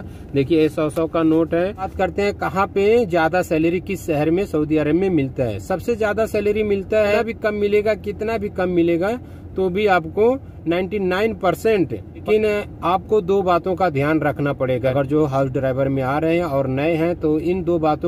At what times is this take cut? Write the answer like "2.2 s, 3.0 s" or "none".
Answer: 1.9 s, 7.2 s, 12.2 s, 14.9 s